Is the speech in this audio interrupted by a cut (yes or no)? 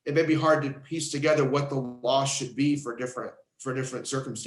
yes